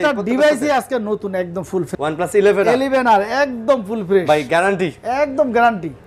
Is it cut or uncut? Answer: cut